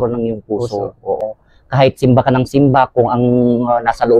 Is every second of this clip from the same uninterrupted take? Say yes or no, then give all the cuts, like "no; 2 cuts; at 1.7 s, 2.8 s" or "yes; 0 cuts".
no; 1 cut; at 1.2 s